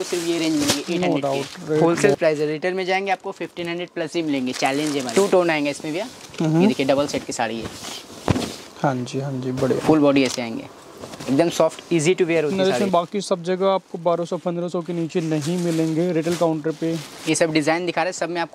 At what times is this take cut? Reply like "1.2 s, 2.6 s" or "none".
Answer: 1.8 s, 5.1 s, 9.9 s, 12.9 s, 17.0 s